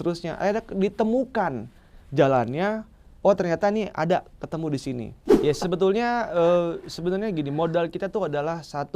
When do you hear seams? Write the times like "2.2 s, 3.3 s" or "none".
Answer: 5.2 s